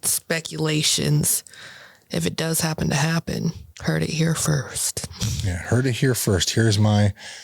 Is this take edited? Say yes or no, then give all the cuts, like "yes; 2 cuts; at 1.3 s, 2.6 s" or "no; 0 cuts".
yes; 1 cut; at 3.7 s